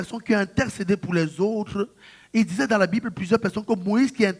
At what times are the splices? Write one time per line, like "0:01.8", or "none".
none

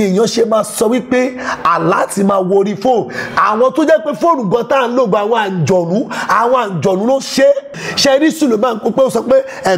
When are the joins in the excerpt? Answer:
0:07.8

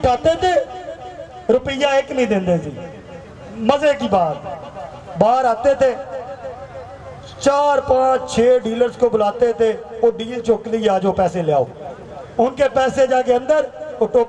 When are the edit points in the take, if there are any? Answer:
none

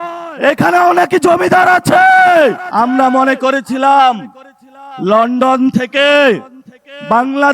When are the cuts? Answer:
0:02.6

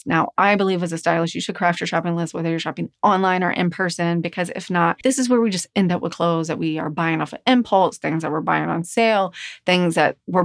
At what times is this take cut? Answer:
0:05.0

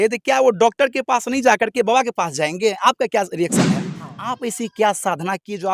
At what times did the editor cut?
0:04.0

